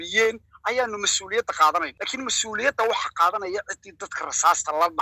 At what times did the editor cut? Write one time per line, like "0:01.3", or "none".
0:02.0